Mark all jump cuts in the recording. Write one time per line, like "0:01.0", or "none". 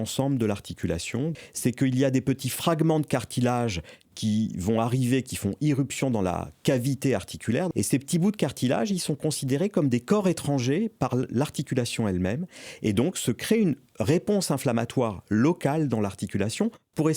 0:01.3
0:07.7